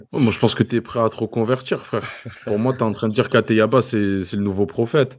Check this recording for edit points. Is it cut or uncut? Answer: uncut